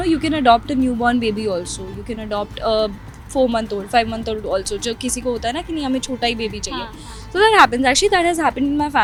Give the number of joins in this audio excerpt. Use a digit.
0